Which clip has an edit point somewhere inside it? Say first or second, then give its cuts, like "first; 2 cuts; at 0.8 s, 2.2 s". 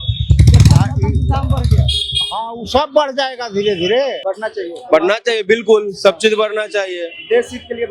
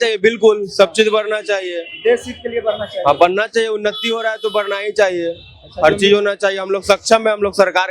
first; 1 cut; at 4.2 s